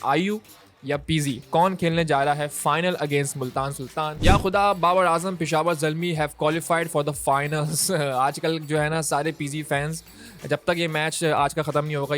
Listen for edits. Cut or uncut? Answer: cut